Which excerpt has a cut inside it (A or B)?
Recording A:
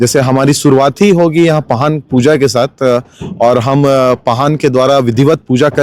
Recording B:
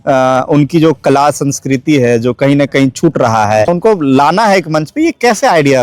B